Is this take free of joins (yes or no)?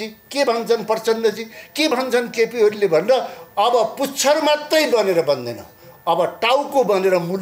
yes